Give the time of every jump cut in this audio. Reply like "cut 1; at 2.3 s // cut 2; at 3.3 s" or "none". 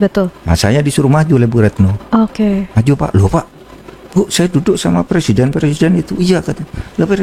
none